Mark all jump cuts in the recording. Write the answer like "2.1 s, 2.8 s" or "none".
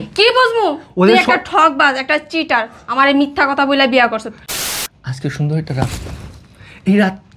4.4 s